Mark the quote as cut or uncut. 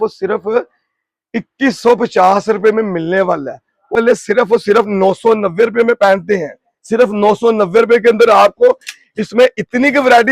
cut